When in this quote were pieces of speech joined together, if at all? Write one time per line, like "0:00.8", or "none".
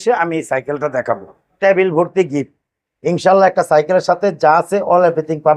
0:01.6